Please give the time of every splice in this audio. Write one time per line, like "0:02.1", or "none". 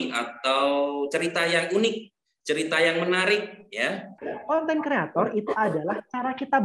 0:04.3